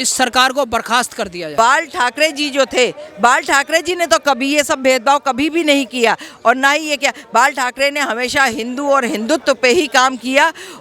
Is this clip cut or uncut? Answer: cut